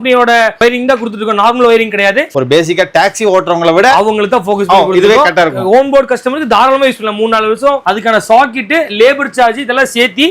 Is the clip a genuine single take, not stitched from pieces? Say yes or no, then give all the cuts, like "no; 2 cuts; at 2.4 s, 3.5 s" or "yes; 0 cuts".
no; 2 cuts; at 2.3 s, 7.8 s